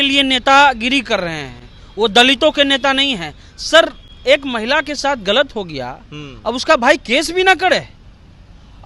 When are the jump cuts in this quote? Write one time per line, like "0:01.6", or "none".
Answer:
none